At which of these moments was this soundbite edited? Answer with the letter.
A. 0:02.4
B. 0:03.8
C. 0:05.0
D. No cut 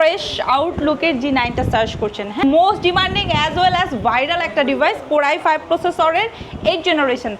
A